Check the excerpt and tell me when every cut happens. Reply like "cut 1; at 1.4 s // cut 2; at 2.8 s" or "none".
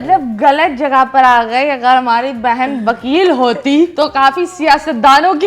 cut 1; at 3.9 s